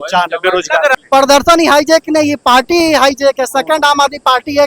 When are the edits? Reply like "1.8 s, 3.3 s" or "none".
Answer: 0.9 s